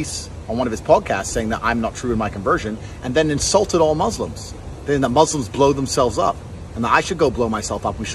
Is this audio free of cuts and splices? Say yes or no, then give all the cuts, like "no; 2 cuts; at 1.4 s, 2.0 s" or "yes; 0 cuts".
yes; 0 cuts